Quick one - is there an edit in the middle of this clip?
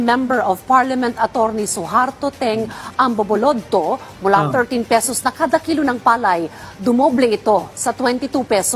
no; 0 cuts

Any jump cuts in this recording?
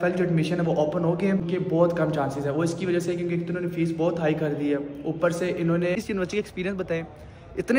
yes; 2 cuts; at 1.5 s, 6.0 s

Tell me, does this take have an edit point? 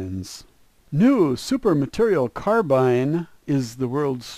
yes; 1 cut; at 2.6 s

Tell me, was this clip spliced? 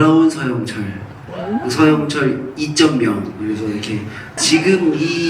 yes; 1 cut; at 4.2 s

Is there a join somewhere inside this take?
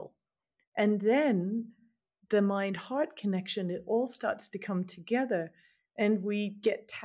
no; 0 cuts

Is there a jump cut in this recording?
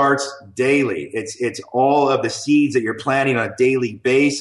no; 0 cuts

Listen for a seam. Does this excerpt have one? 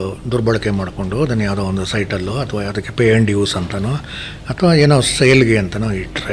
no; 0 cuts

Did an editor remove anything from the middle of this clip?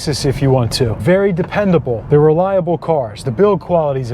yes; 2 cuts; at 1.0 s, 2.0 s

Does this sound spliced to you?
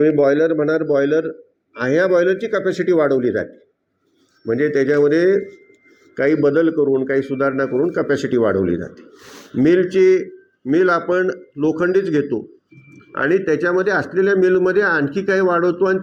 no; 0 cuts

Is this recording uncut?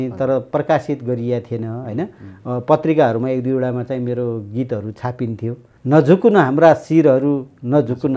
no; 1 cut; at 5.7 s

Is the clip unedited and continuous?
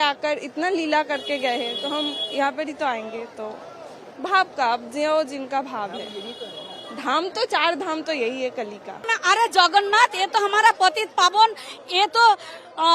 no; 1 cut; at 9.1 s

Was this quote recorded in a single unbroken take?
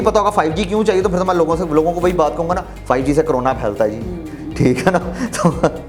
yes; 0 cuts

